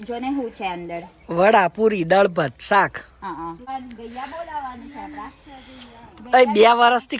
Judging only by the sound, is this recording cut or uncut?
cut